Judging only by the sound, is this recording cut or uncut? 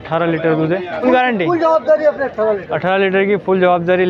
cut